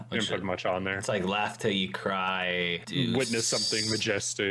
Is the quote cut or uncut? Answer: cut